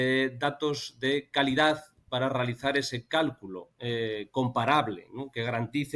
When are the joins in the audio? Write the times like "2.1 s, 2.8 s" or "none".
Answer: none

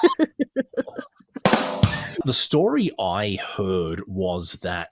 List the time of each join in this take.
2.2 s

